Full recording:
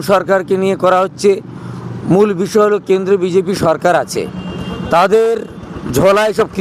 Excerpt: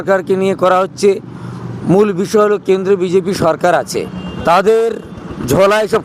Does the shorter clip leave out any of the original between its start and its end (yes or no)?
yes